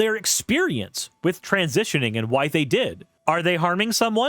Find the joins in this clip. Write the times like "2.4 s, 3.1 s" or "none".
3.1 s